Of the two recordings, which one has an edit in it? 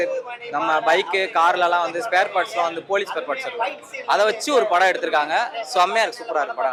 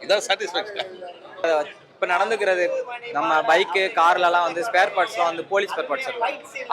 second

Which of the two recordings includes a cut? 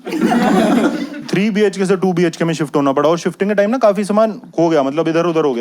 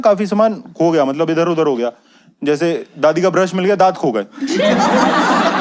first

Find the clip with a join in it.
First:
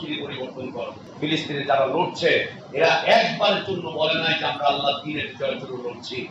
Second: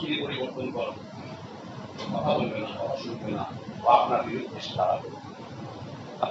first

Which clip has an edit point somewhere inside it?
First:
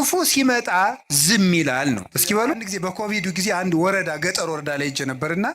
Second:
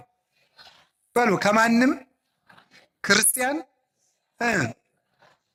first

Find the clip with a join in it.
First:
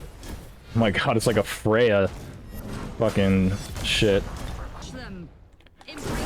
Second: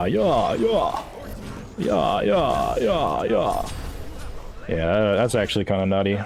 first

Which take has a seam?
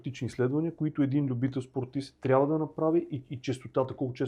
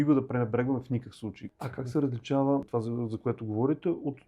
second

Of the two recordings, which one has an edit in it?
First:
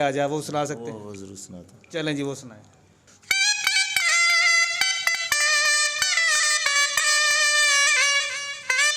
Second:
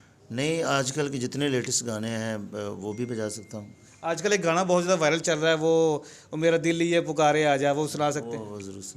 first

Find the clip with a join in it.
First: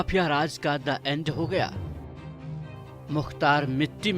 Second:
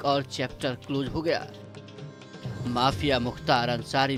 first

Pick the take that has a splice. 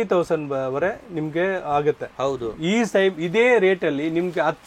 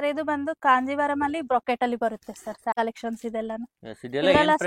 second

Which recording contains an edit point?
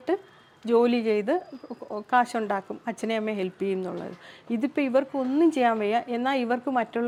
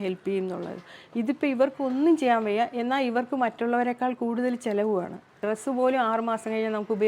second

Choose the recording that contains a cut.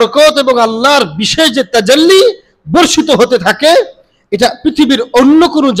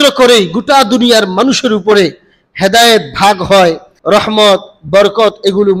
second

